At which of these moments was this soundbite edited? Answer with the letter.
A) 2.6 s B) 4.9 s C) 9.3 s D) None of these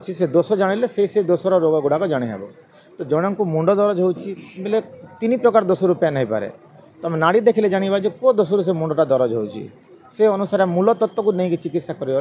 D